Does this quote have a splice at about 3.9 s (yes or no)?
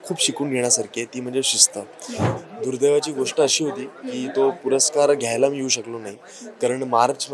no